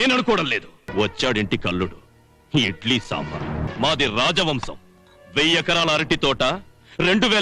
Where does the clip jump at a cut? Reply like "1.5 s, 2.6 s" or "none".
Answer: 0.9 s, 3.7 s